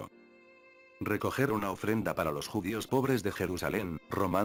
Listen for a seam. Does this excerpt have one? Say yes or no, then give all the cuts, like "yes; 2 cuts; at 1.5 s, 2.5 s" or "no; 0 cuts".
no; 0 cuts